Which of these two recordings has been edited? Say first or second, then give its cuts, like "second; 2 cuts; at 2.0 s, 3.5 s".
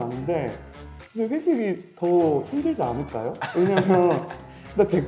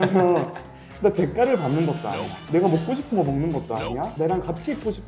second; 2 cuts; at 2.4 s, 4.1 s